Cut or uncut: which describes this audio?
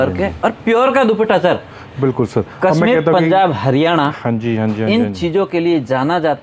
uncut